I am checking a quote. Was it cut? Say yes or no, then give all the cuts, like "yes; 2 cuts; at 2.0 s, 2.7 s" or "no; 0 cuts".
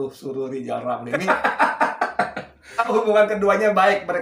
yes; 2 cuts; at 1.1 s, 2.9 s